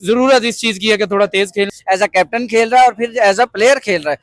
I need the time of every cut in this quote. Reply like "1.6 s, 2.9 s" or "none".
1.7 s